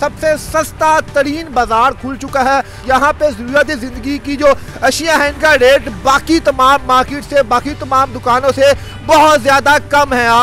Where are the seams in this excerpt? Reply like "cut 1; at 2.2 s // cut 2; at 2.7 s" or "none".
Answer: cut 1; at 2.8 s